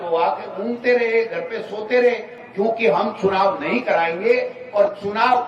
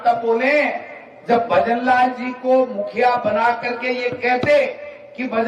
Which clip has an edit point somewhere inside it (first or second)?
first